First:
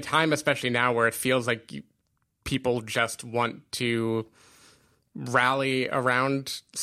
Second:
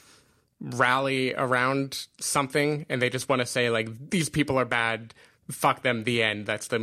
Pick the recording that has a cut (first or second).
second